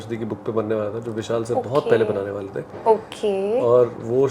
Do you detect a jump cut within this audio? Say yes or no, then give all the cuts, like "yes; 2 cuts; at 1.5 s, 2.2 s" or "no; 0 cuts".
no; 0 cuts